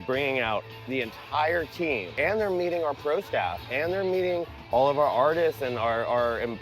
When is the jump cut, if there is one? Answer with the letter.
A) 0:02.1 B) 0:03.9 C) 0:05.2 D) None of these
A